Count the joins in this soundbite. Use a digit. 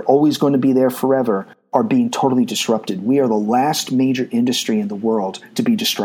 1